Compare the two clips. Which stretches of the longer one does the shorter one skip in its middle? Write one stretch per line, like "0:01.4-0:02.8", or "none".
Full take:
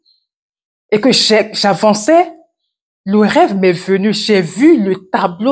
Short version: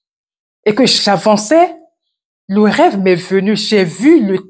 0:01.2-0:01.5